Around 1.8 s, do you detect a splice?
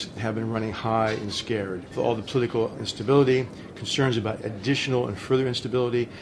yes; 1 cut; at 1.8 s

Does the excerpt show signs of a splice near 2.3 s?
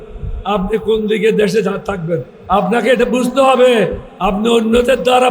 yes; 2 cuts; at 2.3 s, 4.1 s

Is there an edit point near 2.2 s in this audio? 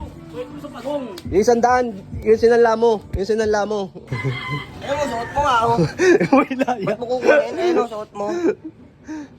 no; 1 cut; at 4.0 s

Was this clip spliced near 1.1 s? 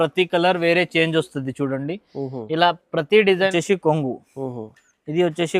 no; 1 cut; at 3.5 s

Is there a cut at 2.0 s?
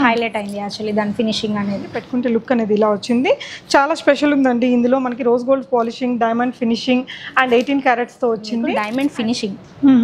yes; 2 cuts; at 2.0 s, 8.8 s

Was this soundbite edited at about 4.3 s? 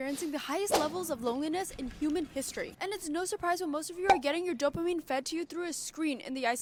no; 0 cuts

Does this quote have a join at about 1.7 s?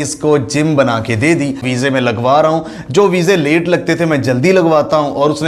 yes; 1 cut; at 1.7 s

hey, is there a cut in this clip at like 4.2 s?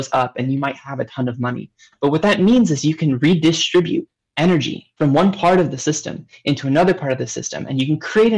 no; 0 cuts

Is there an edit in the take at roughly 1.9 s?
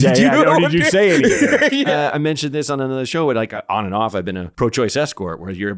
yes; 3 cuts; at 1.9 s, 3.5 s, 4.5 s

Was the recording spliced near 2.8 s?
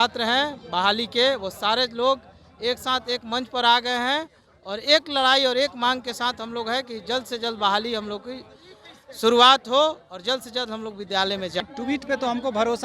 no; 1 cut; at 11.6 s

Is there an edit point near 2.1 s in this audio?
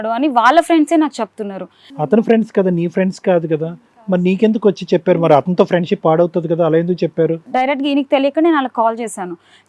yes; 2 cuts; at 2.1 s, 7.4 s

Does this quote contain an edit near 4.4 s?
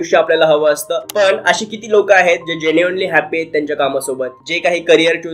yes; 1 cut; at 4.4 s

